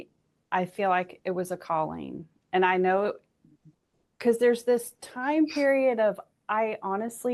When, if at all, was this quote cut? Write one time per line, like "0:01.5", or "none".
none